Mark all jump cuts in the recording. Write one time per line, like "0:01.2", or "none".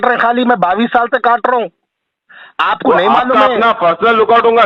none